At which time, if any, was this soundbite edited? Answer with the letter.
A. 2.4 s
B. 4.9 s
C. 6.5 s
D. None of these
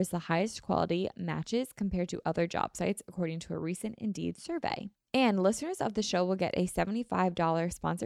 B